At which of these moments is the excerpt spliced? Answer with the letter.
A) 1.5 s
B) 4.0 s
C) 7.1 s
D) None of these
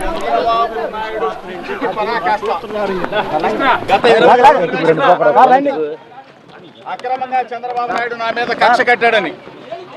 A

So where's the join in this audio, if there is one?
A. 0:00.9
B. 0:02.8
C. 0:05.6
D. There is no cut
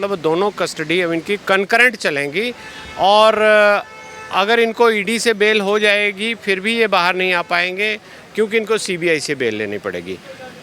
D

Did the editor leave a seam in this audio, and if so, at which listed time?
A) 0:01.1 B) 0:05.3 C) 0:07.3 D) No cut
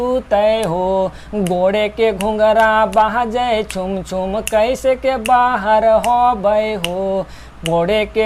D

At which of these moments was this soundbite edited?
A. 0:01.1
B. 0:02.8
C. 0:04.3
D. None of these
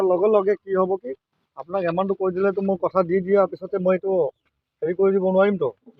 D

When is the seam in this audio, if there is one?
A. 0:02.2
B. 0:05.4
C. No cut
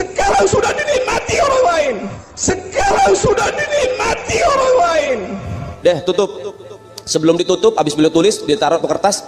B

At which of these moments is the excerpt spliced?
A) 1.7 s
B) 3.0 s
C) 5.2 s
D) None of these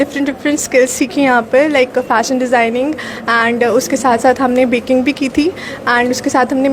D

